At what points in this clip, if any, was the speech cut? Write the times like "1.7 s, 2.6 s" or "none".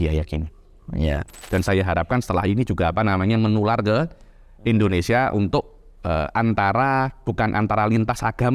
1.4 s